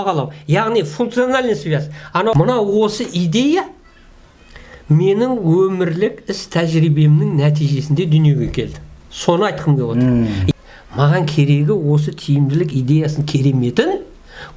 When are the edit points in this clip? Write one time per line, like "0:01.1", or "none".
0:02.3
0:10.5